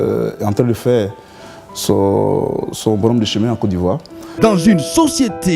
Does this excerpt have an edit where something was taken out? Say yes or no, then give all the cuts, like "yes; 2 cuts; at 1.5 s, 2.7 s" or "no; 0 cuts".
yes; 1 cut; at 4.1 s